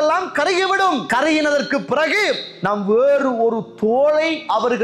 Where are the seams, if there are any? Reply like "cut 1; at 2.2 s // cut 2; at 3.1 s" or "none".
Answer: cut 1; at 1.0 s